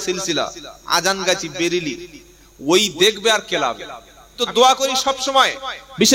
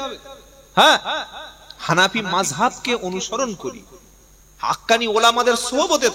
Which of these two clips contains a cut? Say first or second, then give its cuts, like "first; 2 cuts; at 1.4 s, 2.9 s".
first; 1 cut; at 4.4 s